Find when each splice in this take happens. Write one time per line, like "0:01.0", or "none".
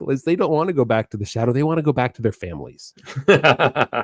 none

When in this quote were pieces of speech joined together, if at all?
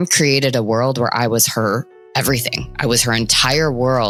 none

